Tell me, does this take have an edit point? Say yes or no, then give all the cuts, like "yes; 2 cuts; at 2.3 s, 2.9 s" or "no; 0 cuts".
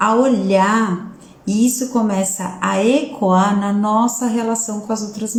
no; 0 cuts